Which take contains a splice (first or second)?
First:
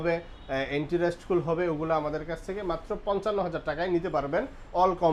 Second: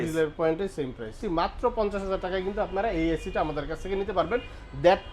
second